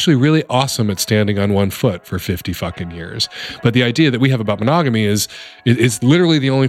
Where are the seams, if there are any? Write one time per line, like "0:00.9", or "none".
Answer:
none